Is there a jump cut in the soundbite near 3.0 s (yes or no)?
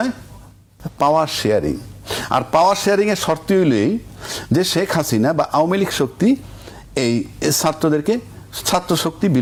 no